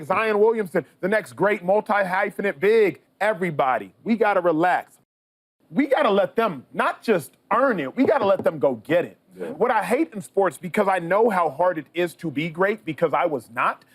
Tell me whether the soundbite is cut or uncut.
cut